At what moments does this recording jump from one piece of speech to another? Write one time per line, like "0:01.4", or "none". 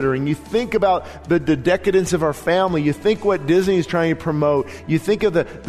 none

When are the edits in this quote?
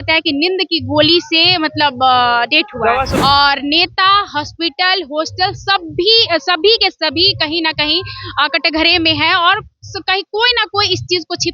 0:03.1

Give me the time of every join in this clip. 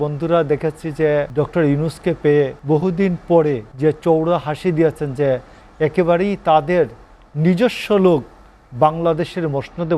0:01.3
0:02.6
0:03.7

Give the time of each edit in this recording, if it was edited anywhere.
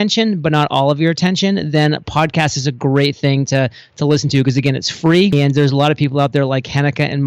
0:05.3

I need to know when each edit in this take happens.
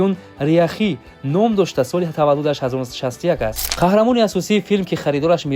0:03.6

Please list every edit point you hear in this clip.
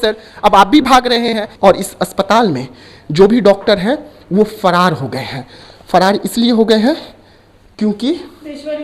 0:01.5

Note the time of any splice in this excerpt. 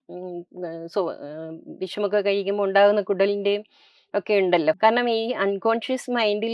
0:04.8

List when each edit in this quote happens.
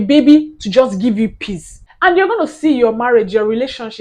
0:01.8

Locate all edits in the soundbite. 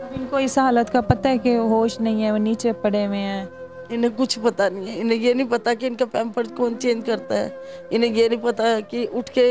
none

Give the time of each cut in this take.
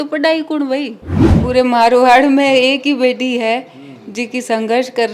0:01.3

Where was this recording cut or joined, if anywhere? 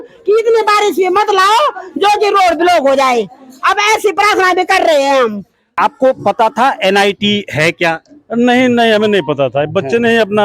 0:05.7

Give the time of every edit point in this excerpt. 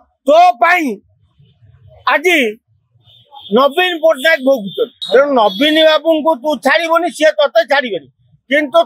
0:05.0

